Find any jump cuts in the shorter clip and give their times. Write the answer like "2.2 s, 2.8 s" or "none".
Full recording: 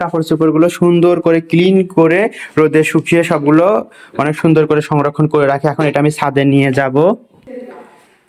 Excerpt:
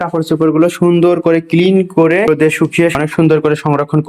2.5 s